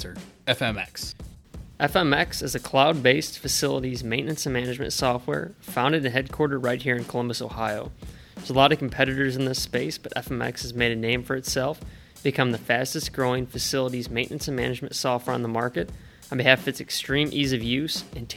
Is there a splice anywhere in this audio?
no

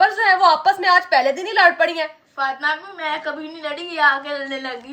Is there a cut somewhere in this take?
no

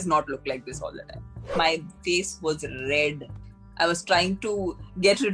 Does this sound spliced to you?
yes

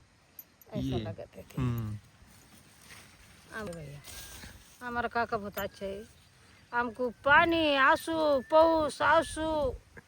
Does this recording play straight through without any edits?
no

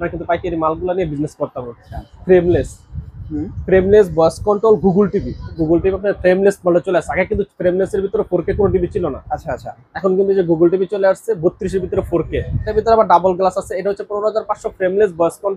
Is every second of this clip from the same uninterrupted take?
no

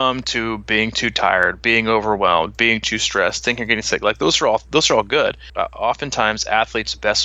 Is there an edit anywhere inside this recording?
yes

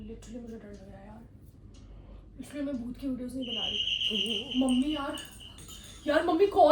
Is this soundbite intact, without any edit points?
yes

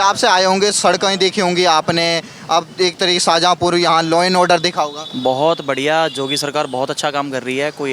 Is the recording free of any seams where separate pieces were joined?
yes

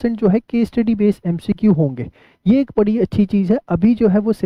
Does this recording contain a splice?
no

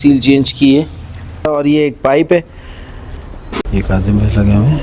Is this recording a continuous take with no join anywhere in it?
no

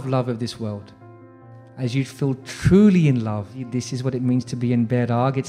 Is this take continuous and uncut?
no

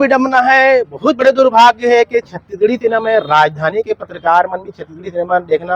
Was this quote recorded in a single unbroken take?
yes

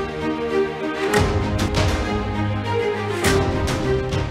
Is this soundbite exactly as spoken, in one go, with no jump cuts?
no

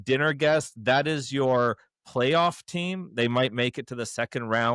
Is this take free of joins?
yes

